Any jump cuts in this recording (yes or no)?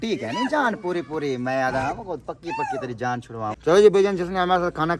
yes